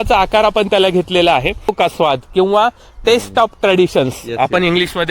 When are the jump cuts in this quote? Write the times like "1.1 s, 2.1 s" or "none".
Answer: 1.7 s